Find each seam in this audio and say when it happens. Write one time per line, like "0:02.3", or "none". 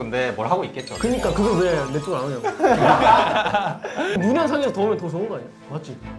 0:04.2